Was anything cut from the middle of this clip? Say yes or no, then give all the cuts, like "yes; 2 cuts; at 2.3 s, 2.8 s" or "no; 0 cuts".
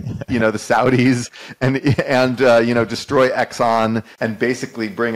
yes; 1 cut; at 4.1 s